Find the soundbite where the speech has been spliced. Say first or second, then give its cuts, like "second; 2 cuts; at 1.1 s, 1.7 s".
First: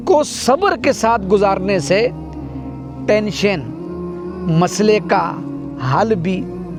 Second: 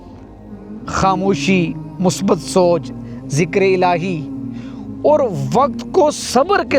second; 1 cut; at 0.9 s